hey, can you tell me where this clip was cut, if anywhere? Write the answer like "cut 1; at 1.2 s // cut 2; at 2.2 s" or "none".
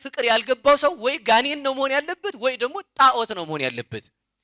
none